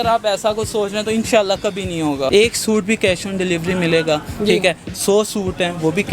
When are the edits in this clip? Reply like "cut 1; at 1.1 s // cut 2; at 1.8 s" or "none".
cut 1; at 2.3 s